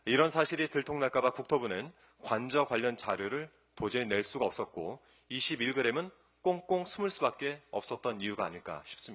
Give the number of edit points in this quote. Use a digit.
0